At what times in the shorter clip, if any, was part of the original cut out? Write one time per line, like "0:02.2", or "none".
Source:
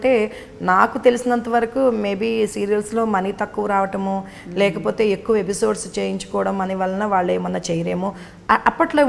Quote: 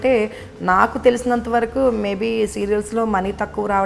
none

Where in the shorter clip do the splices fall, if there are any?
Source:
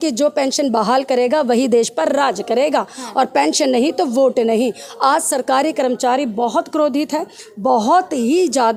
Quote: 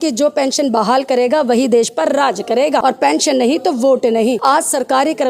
0:02.8
0:04.4

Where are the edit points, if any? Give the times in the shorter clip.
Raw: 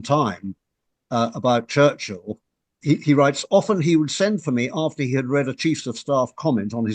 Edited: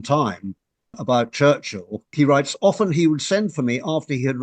0:01.0
0:02.1

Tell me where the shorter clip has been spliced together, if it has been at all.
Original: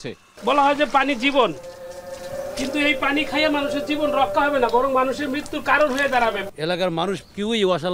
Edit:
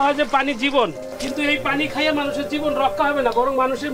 0:01.1

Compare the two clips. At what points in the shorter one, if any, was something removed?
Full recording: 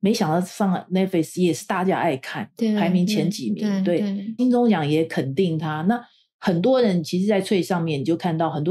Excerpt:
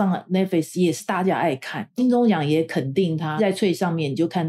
0:01.9
0:03.4

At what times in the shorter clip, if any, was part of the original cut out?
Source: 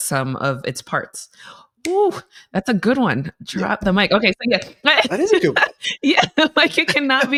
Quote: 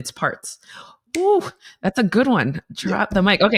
none

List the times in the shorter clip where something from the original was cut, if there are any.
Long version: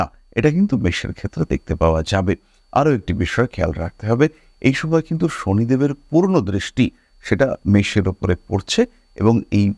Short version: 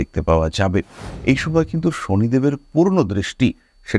0:01.1

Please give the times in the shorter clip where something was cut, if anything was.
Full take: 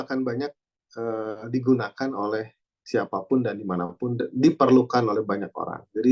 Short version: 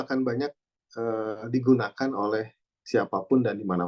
none

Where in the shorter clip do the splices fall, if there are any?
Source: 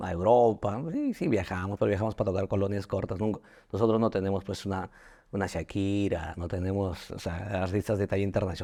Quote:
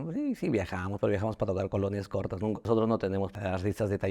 0:02.6
0:03.3

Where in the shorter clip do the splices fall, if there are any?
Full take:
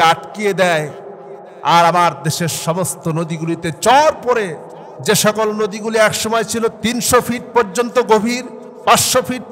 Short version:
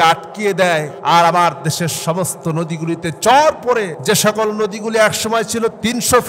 0:00.9
0:03.9

